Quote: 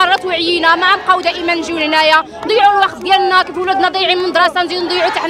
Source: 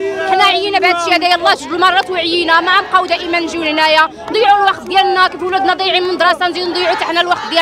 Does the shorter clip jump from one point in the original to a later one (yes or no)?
no